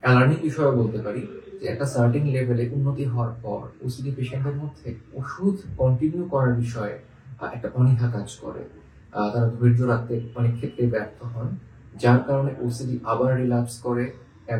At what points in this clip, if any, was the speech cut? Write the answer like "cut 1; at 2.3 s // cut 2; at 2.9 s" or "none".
none